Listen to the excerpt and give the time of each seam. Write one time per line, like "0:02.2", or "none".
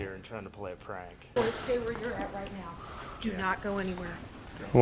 0:01.2

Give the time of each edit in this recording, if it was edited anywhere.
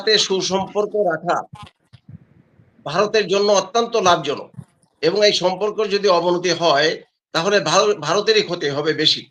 none

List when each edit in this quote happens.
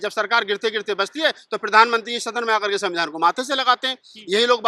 none

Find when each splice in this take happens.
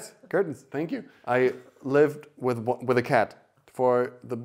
0:01.1

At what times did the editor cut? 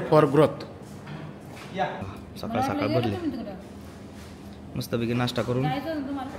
none

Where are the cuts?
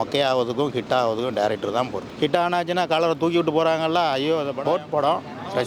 0:02.0
0:04.5

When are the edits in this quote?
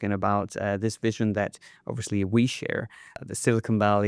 0:03.0

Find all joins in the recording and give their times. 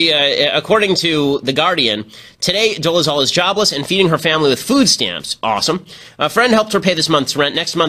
0:03.7

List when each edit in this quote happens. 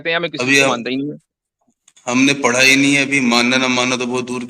none

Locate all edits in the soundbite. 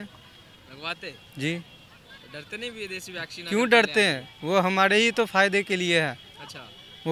none

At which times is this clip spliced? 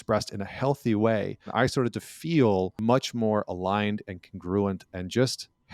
0:01.5
0:02.7

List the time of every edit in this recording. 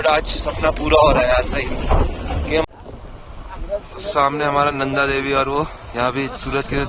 0:02.6

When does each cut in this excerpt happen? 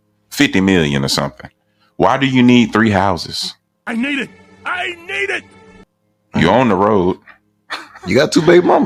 none

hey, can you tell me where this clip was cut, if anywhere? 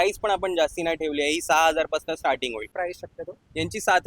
0:02.7

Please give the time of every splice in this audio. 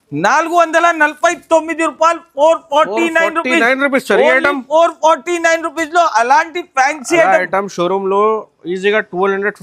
none

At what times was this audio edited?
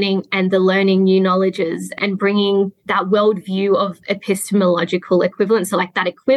0:02.0

